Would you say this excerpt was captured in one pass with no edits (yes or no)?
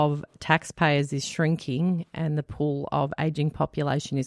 yes